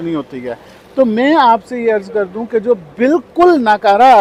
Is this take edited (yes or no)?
no